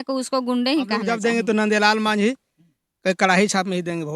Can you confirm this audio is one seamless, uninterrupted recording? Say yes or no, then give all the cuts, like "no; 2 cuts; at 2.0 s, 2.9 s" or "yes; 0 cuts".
no; 1 cut; at 1.1 s